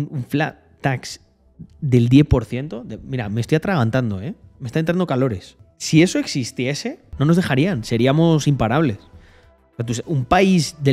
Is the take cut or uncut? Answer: cut